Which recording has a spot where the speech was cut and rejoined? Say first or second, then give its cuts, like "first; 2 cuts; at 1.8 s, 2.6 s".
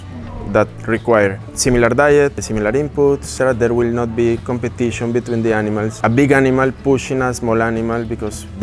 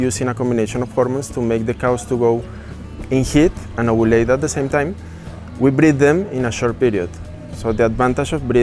first; 3 cuts; at 1.5 s, 2.9 s, 5.9 s